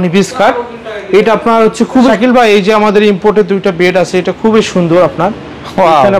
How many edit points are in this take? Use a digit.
1